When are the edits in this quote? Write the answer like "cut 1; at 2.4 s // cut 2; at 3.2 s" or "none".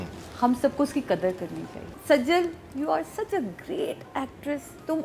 cut 1; at 2.0 s

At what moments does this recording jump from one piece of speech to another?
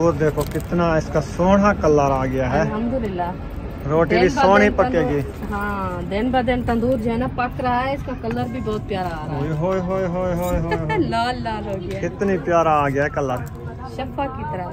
none

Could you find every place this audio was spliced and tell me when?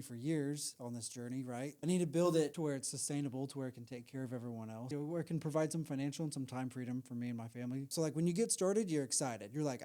cut 1; at 1.7 s // cut 2; at 2.5 s // cut 3; at 4.9 s // cut 4; at 7.9 s

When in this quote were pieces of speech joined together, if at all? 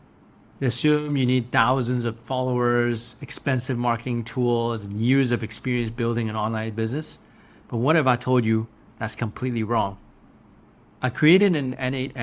none

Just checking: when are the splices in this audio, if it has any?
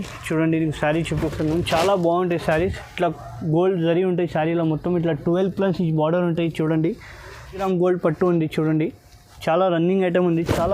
cut 1; at 7.6 s

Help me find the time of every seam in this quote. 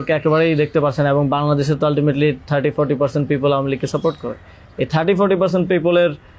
none

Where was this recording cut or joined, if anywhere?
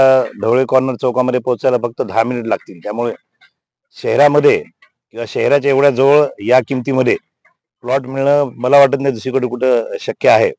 none

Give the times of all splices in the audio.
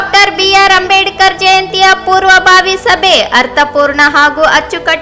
none

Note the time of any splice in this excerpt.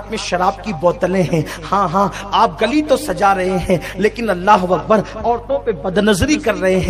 none

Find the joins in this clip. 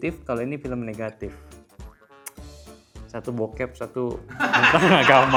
none

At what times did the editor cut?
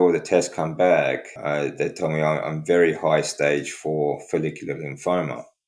cut 1; at 1.3 s

